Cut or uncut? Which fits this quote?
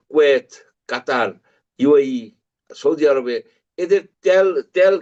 uncut